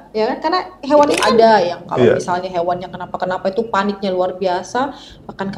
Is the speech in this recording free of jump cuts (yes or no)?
no